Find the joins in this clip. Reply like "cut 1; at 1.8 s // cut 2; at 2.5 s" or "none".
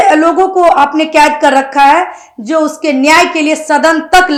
none